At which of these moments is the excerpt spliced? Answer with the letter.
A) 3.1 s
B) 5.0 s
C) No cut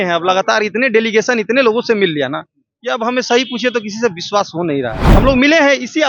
B